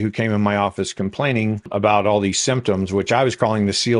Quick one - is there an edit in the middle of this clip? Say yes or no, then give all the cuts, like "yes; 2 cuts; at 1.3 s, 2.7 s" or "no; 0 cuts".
yes; 1 cut; at 1.7 s